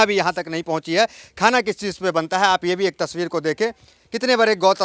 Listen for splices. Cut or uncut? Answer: uncut